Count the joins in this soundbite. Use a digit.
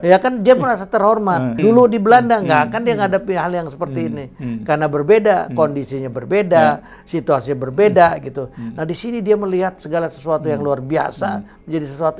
1